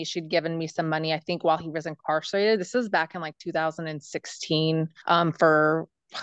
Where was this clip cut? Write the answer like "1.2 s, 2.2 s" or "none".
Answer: 5.0 s